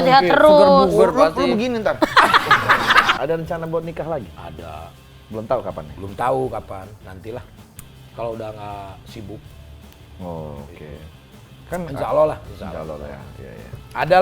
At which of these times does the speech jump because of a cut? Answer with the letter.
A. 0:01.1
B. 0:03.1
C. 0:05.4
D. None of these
B